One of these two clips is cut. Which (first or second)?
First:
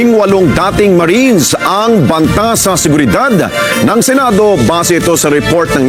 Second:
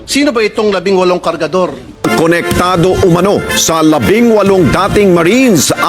second